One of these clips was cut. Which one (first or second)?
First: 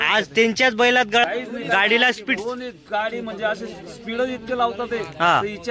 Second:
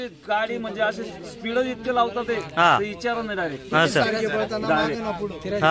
first